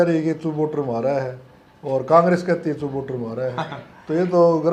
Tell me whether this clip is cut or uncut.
uncut